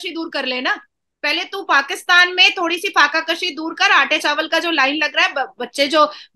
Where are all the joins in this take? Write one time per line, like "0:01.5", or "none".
none